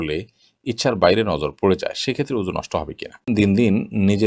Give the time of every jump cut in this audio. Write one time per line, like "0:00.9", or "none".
0:03.3